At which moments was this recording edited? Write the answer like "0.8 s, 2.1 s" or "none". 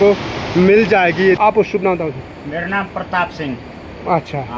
1.4 s